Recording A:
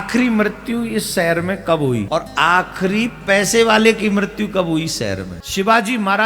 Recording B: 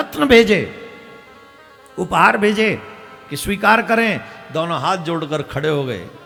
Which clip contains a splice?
A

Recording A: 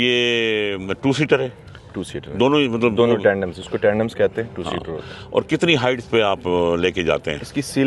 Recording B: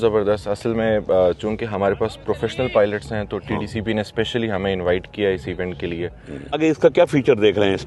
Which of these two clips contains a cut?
B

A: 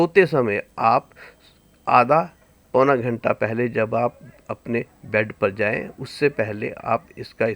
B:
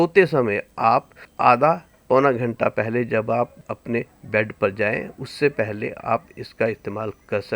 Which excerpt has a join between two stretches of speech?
B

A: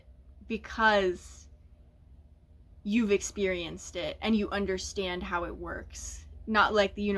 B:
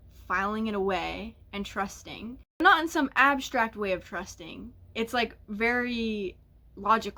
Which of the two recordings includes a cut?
B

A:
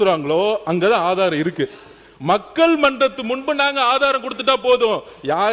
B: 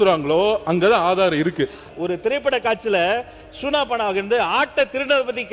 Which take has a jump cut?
B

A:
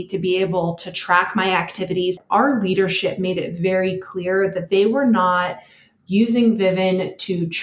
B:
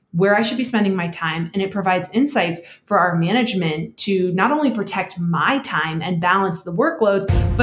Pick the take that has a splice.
A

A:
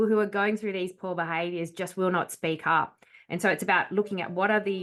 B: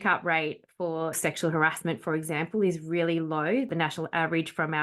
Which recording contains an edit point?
B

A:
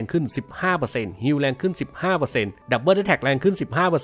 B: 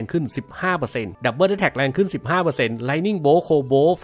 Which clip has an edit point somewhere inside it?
B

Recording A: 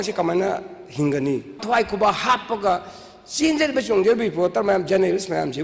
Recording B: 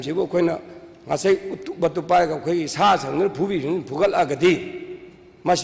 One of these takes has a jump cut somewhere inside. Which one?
A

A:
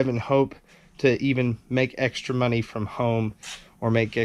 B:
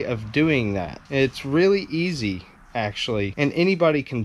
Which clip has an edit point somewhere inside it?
B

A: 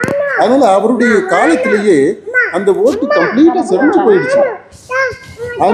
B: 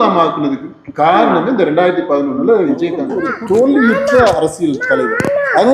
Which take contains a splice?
B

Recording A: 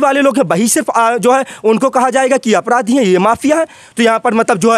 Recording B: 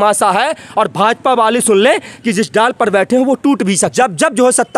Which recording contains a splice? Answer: B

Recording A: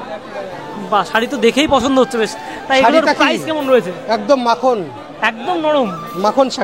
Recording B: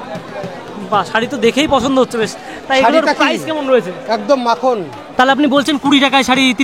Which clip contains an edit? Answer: B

